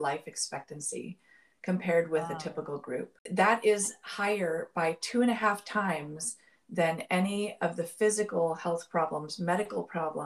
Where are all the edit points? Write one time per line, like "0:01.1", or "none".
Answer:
0:03.2